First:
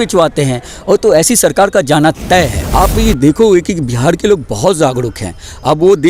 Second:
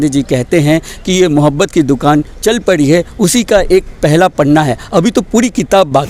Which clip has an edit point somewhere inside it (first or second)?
first